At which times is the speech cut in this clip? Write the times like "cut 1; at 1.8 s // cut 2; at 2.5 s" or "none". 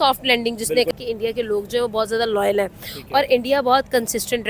cut 1; at 0.9 s